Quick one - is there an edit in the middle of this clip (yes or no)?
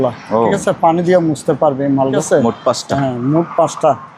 yes